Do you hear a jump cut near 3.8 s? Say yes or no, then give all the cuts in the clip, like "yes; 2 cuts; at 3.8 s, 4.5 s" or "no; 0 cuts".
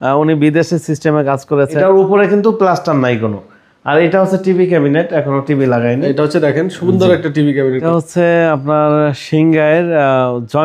no; 2 cuts; at 1.8 s, 7.8 s